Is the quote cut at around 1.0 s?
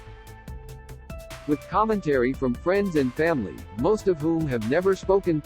yes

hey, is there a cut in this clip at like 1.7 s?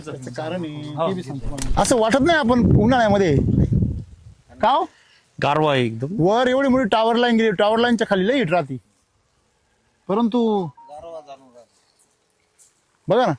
yes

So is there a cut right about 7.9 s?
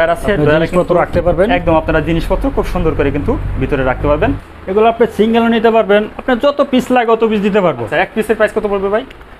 yes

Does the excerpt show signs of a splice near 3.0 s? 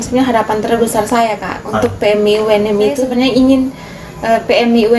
yes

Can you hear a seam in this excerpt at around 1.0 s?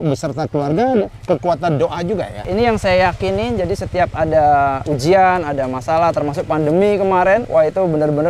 no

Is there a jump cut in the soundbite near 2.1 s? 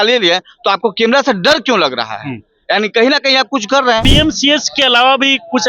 no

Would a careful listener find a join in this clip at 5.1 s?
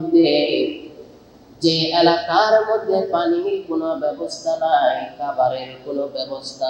no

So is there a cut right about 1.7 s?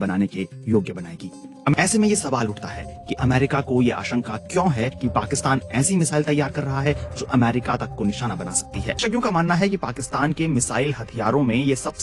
yes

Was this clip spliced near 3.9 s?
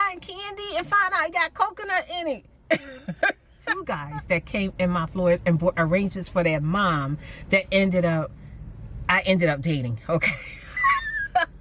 yes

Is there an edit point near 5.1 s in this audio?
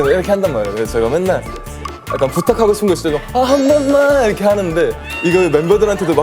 yes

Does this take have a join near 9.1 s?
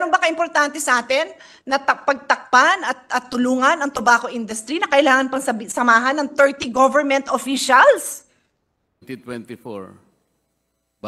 yes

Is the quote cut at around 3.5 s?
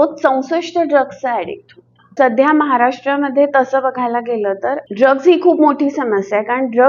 no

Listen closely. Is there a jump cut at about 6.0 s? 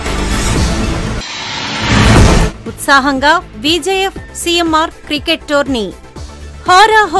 no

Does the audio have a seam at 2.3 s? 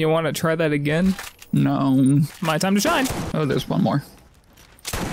yes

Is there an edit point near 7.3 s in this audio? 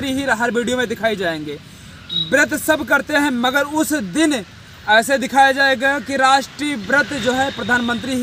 no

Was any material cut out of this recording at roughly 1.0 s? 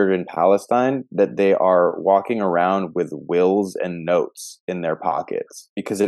no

